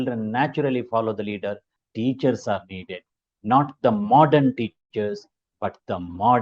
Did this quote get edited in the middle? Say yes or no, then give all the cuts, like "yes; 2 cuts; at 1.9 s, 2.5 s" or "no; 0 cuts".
yes; 1 cut; at 1.7 s